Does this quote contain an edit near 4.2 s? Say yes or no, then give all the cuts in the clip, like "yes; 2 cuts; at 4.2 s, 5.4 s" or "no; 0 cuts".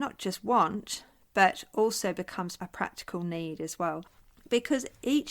yes; 2 cuts; at 2.6 s, 4.2 s